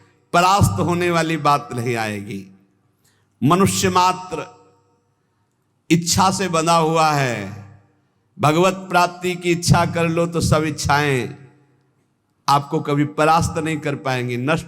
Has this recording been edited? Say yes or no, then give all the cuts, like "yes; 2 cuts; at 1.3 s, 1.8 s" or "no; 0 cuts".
no; 0 cuts